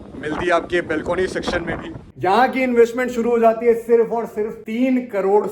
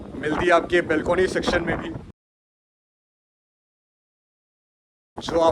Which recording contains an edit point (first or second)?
first